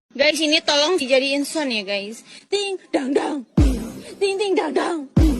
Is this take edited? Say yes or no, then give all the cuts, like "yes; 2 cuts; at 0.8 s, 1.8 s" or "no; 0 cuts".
no; 0 cuts